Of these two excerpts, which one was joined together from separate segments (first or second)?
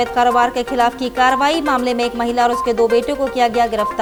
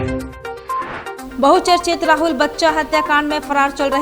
second